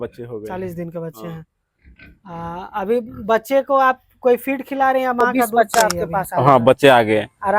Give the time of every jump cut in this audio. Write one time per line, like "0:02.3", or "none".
0:05.7